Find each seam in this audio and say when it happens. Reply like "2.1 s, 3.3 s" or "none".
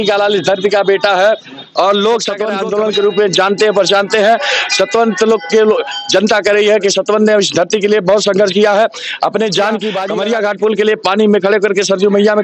2.6 s, 10.0 s